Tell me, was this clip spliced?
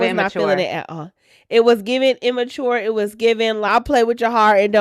yes; 1 cut; at 3.7 s

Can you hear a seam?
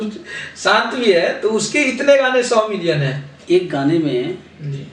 yes; 1 cut; at 3.4 s

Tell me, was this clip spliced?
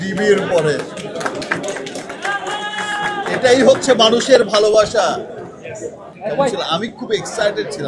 yes; 1 cut; at 6.1 s

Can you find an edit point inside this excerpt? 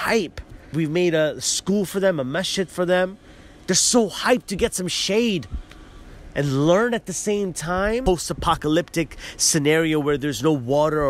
yes; 2 cuts; at 0.7 s, 8.0 s

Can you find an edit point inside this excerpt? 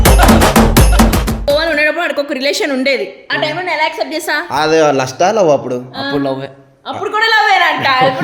yes; 1 cut; at 1.4 s

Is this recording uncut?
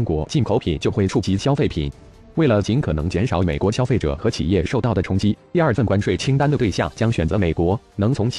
no; 1 cut; at 2.0 s

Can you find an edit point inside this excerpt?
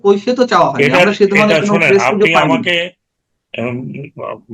no; 0 cuts

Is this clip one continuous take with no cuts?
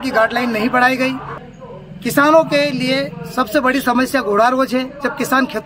no; 1 cut; at 1.3 s

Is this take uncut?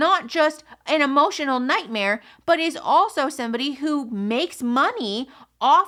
yes; 0 cuts

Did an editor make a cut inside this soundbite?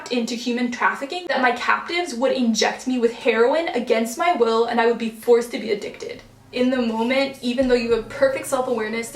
yes; 2 cuts; at 1.3 s, 6.5 s

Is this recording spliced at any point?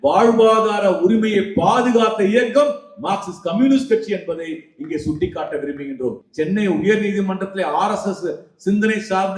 yes; 1 cut; at 6.2 s

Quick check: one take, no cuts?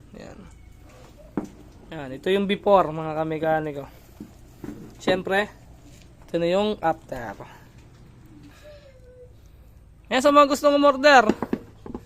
no; 1 cut; at 8.5 s

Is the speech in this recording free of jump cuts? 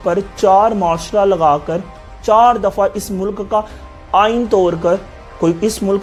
yes; 0 cuts

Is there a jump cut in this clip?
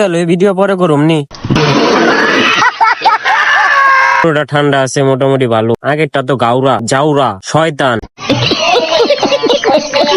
yes; 1 cut; at 4.2 s

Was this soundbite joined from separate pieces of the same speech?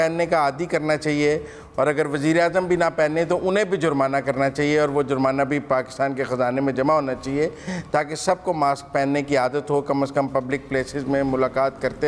no; 0 cuts

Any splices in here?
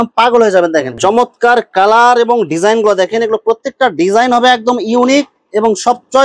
yes; 1 cut; at 1.0 s

